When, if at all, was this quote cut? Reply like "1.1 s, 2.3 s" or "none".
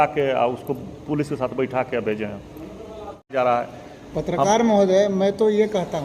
3.3 s